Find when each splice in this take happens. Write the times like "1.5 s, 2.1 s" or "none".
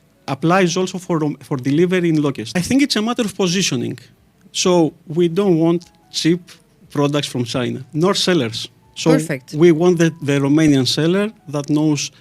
2.6 s